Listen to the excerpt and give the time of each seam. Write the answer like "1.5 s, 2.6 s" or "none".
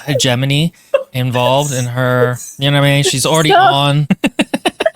4.0 s